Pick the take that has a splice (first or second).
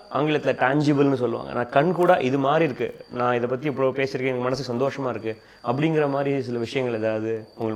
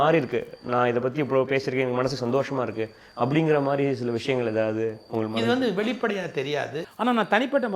second